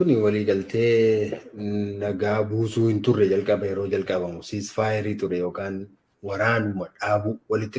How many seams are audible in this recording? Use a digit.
0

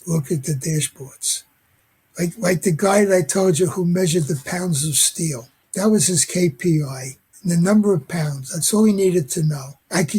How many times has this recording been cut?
0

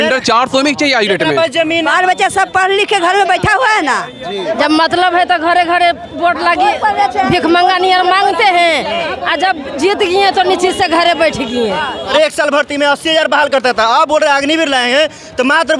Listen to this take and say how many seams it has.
3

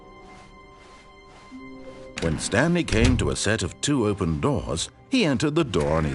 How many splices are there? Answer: 2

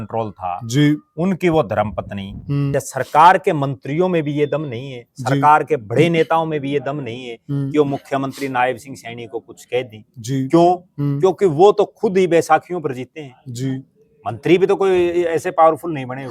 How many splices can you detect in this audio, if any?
1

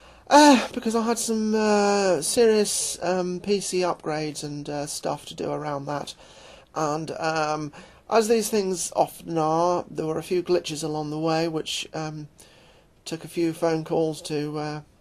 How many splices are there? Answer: 1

